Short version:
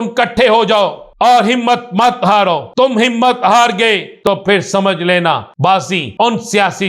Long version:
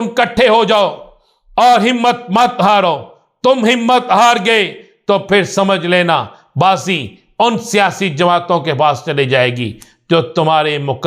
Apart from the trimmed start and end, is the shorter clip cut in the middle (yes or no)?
yes